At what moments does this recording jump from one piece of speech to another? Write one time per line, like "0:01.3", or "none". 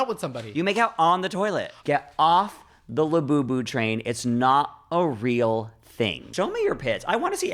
0:01.7
0:06.3